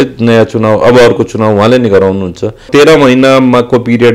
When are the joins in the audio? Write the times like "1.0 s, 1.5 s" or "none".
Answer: 2.7 s